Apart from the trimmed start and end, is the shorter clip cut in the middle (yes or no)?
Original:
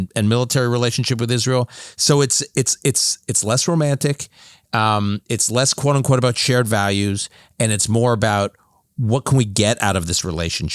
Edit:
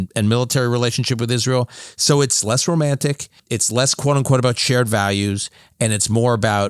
yes